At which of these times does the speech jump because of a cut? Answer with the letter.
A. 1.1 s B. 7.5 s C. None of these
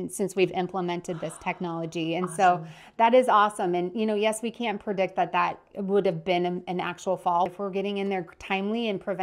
B